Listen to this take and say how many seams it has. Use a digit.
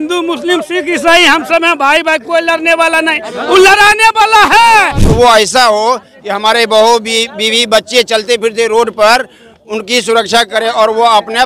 1